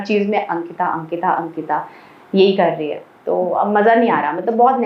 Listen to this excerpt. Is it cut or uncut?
uncut